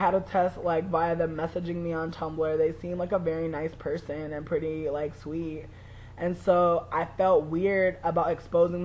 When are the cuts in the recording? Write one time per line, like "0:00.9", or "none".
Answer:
none